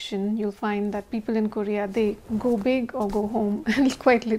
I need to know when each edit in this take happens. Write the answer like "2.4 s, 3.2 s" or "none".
none